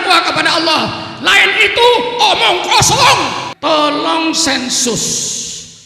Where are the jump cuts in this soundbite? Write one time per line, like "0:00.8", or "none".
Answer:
0:03.5

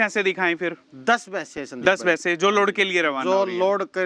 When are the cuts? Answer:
none

